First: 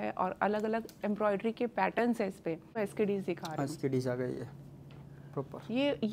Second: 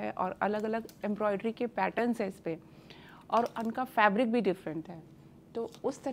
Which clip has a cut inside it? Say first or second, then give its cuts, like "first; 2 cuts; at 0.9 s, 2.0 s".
first; 1 cut; at 2.8 s